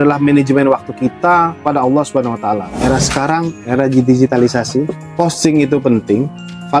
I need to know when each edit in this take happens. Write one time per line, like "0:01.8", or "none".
0:01.5
0:02.7